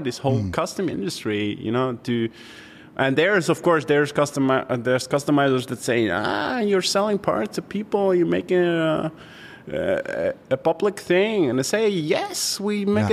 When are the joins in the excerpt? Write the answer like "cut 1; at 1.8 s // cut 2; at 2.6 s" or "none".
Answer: none